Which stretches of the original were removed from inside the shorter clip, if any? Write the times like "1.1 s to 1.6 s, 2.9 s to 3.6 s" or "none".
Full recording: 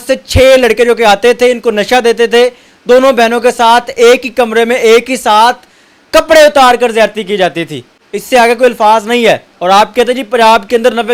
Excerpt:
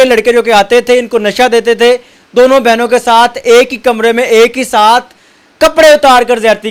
none